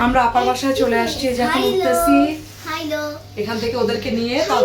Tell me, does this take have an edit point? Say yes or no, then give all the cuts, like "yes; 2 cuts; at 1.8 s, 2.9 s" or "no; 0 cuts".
no; 0 cuts